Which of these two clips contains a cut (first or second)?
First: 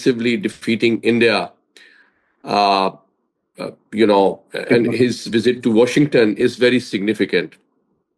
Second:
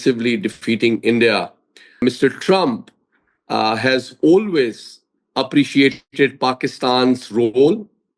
second